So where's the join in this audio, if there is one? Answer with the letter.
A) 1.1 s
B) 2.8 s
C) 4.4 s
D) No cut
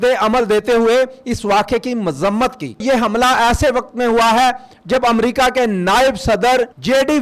B